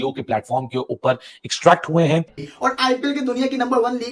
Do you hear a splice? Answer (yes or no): yes